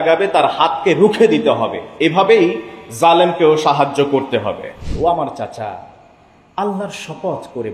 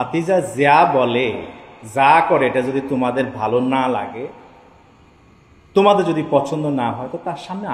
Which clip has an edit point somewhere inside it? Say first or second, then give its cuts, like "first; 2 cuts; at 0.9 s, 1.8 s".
first; 1 cut; at 4.8 s